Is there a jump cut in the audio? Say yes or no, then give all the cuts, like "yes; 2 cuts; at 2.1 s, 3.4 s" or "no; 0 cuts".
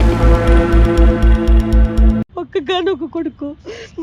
yes; 1 cut; at 2.2 s